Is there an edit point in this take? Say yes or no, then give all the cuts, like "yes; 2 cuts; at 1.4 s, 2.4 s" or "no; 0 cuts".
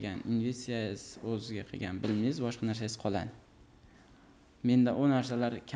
no; 0 cuts